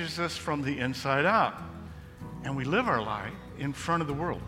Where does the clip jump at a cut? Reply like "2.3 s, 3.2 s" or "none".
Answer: none